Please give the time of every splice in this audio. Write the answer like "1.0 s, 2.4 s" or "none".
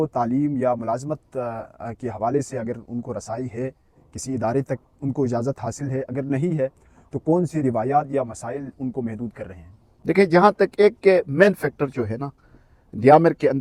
none